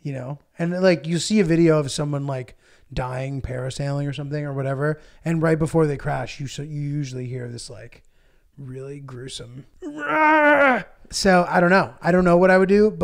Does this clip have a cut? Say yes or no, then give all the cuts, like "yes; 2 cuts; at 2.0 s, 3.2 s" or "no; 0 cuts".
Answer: yes; 2 cuts; at 9.7 s, 11.1 s